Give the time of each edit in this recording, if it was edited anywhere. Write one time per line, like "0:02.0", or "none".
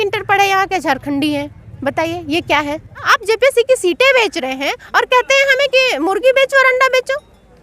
0:03.0